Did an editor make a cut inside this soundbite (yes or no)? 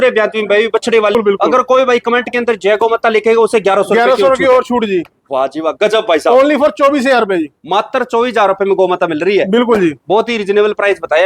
yes